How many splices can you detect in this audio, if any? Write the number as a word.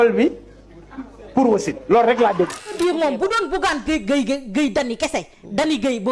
one